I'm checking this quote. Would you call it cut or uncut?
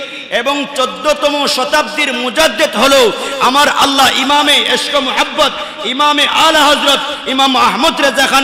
uncut